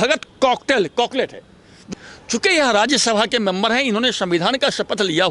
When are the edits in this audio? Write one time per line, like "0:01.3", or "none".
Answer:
0:01.8